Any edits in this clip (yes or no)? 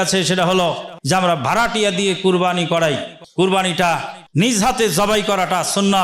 yes